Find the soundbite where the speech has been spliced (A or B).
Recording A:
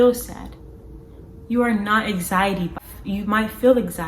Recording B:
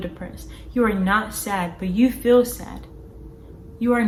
A